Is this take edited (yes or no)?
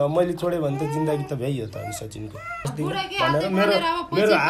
yes